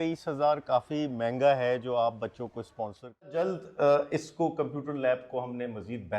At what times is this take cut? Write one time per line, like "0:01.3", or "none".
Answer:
0:03.4